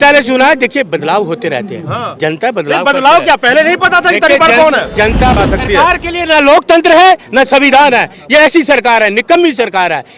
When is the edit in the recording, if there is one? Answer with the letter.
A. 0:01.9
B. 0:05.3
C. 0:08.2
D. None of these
B